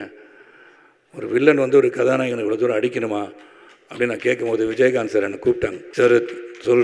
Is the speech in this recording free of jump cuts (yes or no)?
no